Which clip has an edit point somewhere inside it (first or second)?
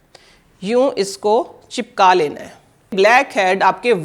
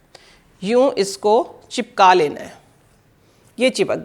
first